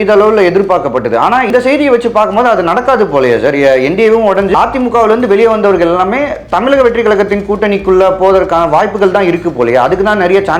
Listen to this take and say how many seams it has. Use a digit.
2